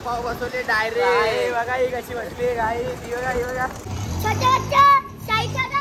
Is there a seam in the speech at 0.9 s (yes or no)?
no